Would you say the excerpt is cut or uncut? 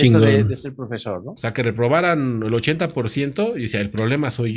cut